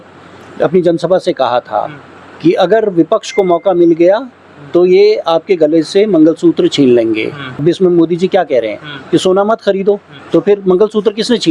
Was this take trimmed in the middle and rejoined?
yes; 2 cuts; at 7.4 s, 10.1 s

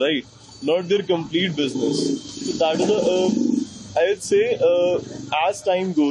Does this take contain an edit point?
no; 0 cuts

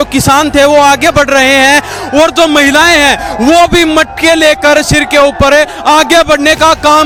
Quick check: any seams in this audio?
no; 0 cuts

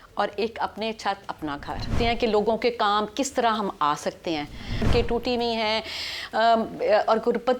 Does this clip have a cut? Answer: yes; 2 cuts; at 1.9 s, 4.9 s

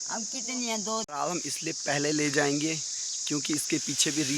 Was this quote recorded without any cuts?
no; 1 cut; at 1.1 s

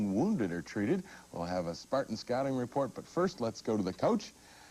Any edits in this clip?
yes; 1 cut; at 2.2 s

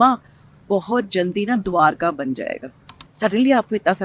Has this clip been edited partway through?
yes; 1 cut; at 3.0 s

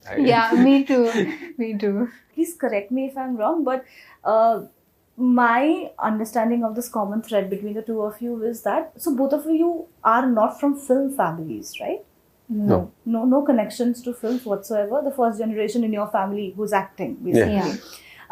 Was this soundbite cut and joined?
no; 0 cuts

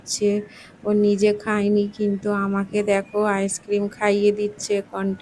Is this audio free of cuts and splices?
yes; 0 cuts

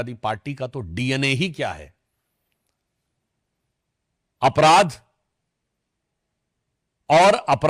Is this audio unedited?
yes; 0 cuts

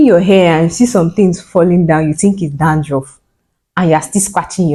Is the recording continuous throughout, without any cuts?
yes; 0 cuts

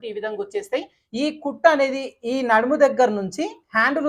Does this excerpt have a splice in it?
yes; 1 cut; at 1.0 s

